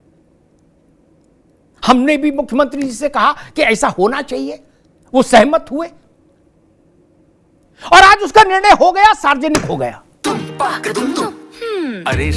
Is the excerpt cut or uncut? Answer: cut